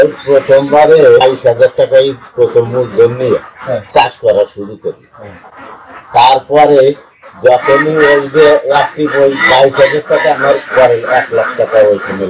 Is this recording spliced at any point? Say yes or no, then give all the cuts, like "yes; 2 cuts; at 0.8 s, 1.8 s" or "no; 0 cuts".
no; 0 cuts